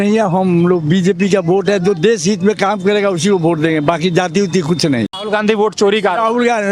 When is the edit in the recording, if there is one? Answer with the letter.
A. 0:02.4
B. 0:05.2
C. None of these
B